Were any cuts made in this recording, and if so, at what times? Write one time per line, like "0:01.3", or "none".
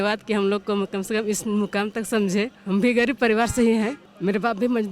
0:02.6
0:04.1